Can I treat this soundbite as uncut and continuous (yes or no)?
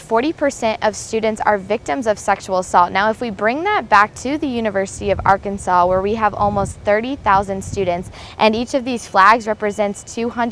yes